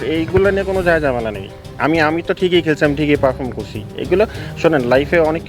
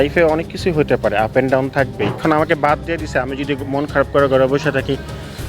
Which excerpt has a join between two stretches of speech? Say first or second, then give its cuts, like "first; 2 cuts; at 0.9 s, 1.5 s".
second; 1 cut; at 2.1 s